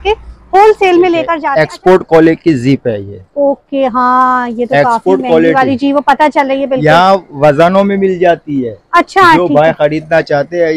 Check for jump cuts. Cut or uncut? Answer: cut